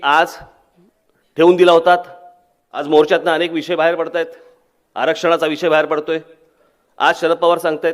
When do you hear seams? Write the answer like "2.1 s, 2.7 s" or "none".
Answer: 2.8 s